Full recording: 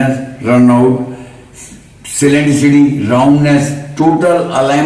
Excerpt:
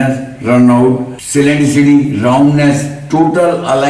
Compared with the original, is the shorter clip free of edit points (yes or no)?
no